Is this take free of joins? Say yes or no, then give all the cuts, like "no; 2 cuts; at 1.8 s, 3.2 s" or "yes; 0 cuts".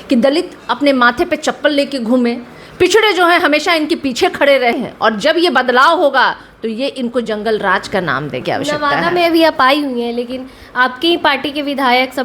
no; 2 cuts; at 4.8 s, 8.4 s